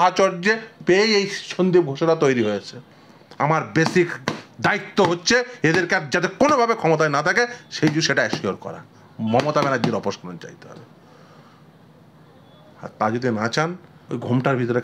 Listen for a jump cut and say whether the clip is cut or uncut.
cut